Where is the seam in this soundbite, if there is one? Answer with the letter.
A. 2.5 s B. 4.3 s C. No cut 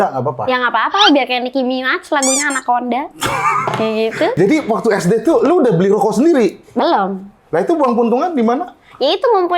B